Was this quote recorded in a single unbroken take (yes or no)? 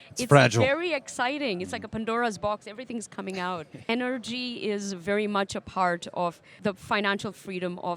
no